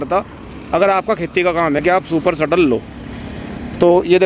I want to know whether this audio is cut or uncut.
uncut